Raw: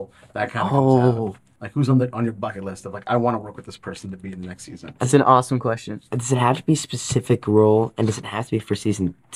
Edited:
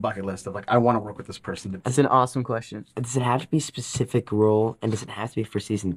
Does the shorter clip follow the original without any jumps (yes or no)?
no